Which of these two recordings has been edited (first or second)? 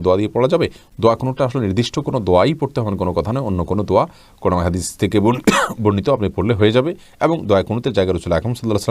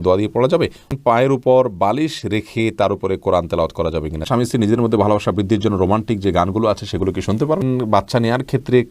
second